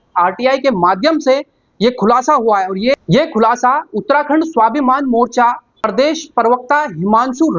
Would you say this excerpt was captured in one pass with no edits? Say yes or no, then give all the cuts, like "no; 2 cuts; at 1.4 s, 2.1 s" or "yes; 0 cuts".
yes; 0 cuts